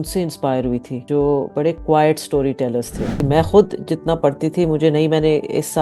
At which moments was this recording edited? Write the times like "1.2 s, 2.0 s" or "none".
0.9 s, 3.1 s

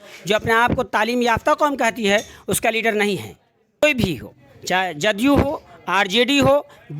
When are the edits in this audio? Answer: 3.8 s

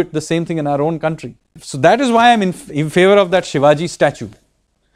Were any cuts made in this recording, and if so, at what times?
1.6 s

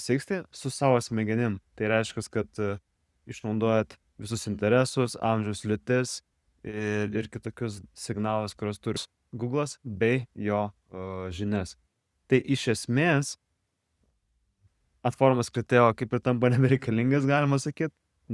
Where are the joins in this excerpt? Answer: 9.0 s

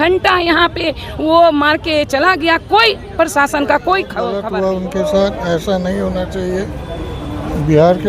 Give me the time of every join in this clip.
4.4 s

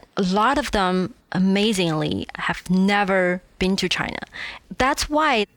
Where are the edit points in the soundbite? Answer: 2.4 s, 4.5 s

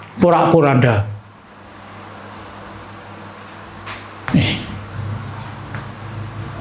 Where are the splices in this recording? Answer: 1.4 s

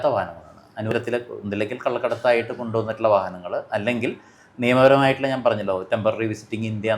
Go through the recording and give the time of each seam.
0.9 s

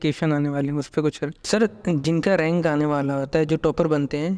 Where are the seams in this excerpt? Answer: 1.3 s

